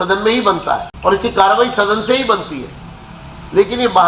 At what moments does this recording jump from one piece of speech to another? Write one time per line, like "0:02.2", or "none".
0:00.9